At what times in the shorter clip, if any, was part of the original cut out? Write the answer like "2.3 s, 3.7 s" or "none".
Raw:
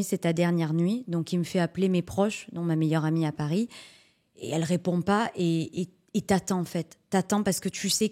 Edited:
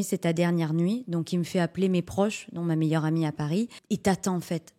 3.8 s